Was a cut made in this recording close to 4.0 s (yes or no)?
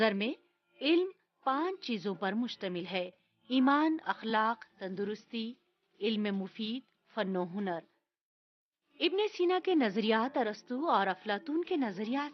no